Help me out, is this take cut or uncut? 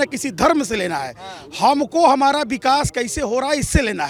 uncut